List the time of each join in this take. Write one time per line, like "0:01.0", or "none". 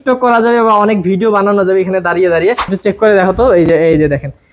0:02.7